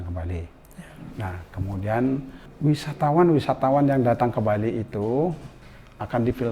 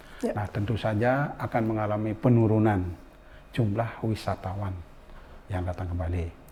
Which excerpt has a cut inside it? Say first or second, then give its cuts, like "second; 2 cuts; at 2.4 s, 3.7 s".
first; 1 cut; at 2.4 s